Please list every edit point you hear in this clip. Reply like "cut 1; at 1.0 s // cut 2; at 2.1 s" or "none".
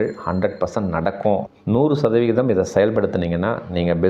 cut 1; at 1.4 s